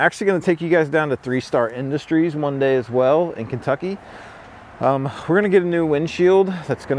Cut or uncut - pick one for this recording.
uncut